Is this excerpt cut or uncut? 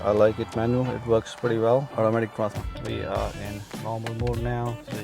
cut